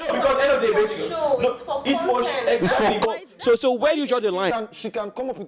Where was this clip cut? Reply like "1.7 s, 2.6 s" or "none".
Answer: 4.5 s